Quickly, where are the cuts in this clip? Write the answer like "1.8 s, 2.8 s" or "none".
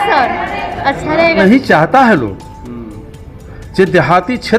1.4 s